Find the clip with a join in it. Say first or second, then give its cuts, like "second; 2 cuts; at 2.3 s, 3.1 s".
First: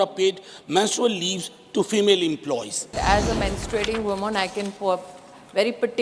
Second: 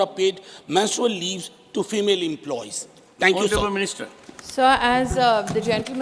first; 1 cut; at 3.0 s